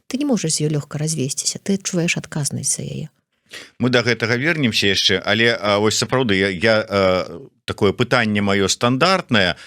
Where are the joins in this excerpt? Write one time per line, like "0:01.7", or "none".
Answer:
none